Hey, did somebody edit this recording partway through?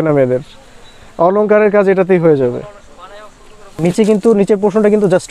yes; 1 cut; at 3.8 s

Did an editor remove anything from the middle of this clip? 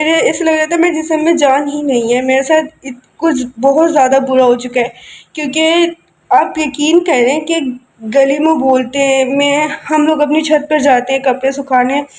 no; 0 cuts

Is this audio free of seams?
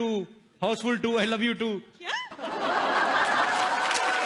yes; 0 cuts

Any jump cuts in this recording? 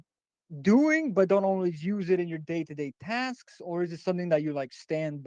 no; 0 cuts

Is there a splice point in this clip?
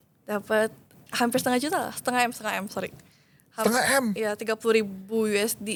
no; 0 cuts

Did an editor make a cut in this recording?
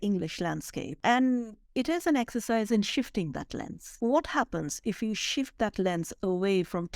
yes; 2 cuts; at 0.9 s, 3.8 s

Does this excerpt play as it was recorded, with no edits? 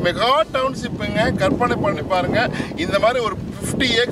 yes; 0 cuts

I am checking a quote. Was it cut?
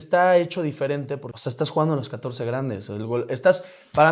yes; 1 cut; at 1.3 s

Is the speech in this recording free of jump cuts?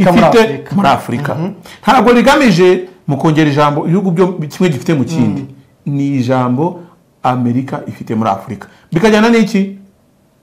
yes; 0 cuts

